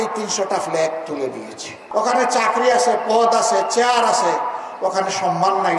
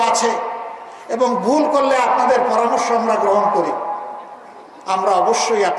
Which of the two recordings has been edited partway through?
first; 1 cut; at 1.8 s

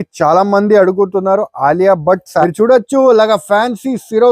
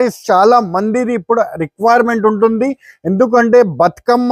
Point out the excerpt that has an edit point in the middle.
first; 1 cut; at 2.4 s

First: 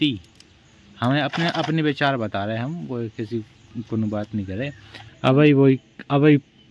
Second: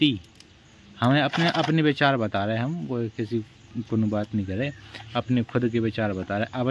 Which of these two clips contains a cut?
first; 1 cut; at 4.9 s

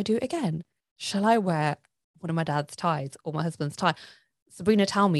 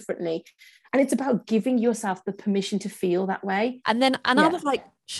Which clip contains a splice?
second; 1 cut; at 3.8 s

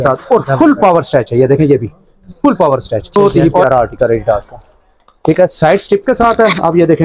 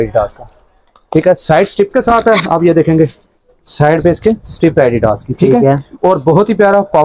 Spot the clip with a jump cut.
first; 1 cut; at 3.2 s

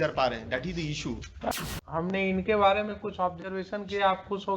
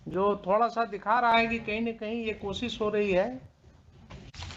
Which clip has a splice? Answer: first; 1 cut; at 1.5 s

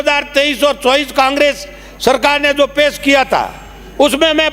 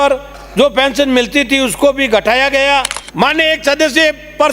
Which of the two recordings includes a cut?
second; 1 cut; at 3.0 s

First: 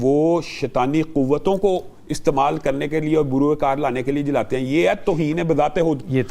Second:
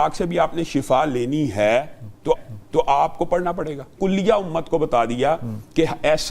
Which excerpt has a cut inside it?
second; 1 cut; at 3.9 s

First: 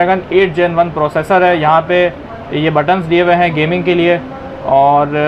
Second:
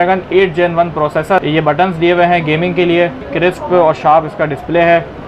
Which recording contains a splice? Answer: second; 2 cuts; at 1.4 s, 3.3 s

